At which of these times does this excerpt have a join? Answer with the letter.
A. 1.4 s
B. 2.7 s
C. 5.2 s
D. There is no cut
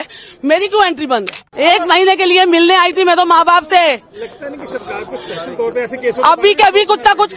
A